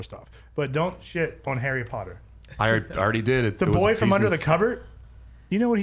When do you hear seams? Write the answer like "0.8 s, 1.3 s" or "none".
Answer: none

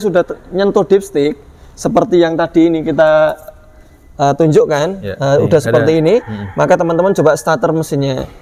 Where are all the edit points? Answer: none

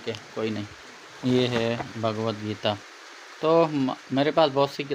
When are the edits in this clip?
1.2 s

